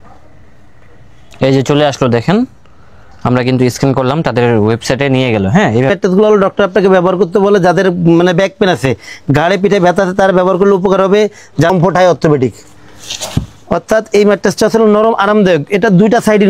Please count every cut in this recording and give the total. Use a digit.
2